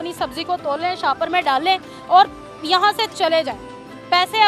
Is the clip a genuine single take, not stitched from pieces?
yes; 0 cuts

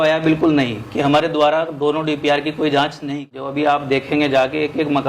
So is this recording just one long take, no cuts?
no; 1 cut; at 3.0 s

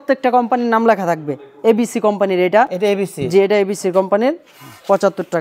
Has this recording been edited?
no; 0 cuts

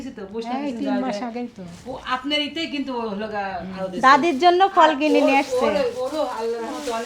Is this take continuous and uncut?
yes; 0 cuts

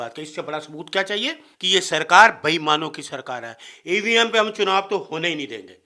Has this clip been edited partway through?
yes; 1 cut; at 1.5 s

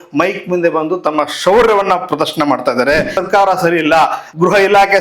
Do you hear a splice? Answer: yes; 1 cut; at 3.2 s

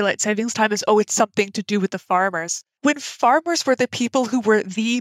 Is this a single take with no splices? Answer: yes; 0 cuts

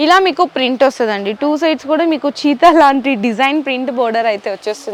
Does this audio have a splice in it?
no; 0 cuts

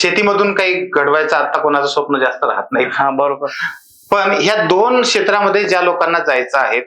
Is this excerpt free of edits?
yes; 0 cuts

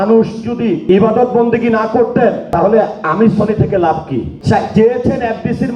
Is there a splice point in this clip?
yes; 3 cuts; at 0.8 s, 2.4 s, 4.3 s

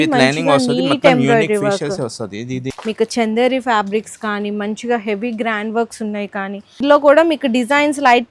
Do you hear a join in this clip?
yes; 2 cuts; at 2.7 s, 6.8 s

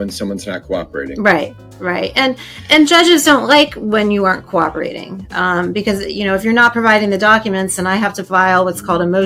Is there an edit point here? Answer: no; 0 cuts

